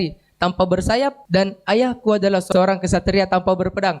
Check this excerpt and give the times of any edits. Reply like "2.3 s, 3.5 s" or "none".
1.2 s, 2.5 s